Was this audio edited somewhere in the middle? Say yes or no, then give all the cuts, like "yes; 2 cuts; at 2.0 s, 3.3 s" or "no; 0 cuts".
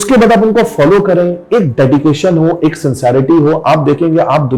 no; 0 cuts